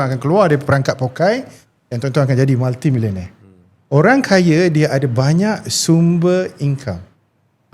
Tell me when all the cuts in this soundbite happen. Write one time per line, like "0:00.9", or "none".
none